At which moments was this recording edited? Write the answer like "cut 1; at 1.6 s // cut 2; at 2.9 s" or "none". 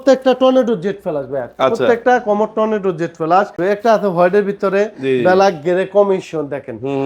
cut 1; at 3.6 s

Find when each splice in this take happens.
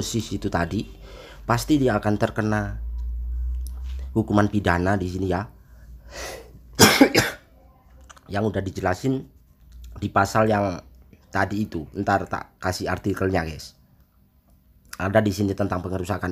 none

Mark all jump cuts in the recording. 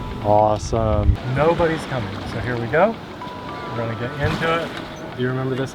cut 1; at 1.1 s

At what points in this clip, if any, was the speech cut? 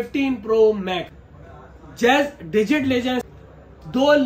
cut 1; at 1.2 s // cut 2; at 3.2 s

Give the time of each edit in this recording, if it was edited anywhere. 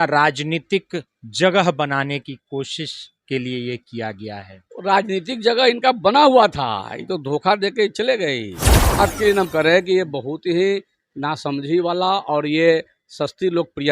cut 1; at 9.0 s

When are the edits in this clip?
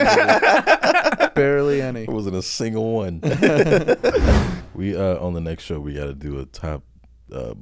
cut 1; at 4.6 s

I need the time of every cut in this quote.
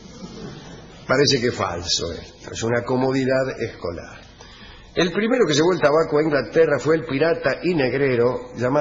cut 1; at 6.1 s

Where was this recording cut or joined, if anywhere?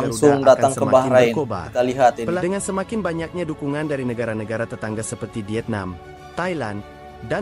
cut 1; at 2.4 s

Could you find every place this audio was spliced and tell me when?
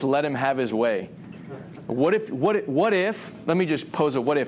none

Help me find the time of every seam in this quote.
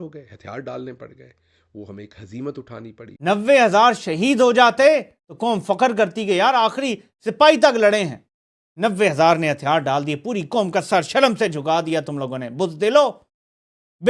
cut 1; at 3.1 s

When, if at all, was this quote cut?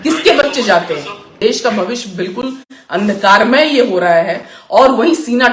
cut 1; at 1.4 s

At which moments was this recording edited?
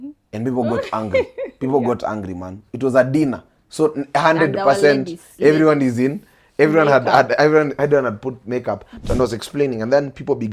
cut 1; at 8.9 s

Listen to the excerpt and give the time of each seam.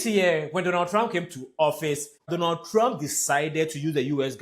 cut 1; at 2.3 s

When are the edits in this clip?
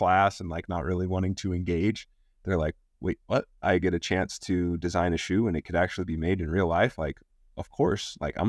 none

